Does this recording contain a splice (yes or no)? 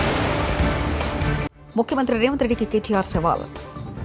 yes